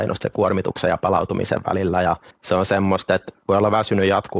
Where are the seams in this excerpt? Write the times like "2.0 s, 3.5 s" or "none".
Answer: 2.3 s, 3.3 s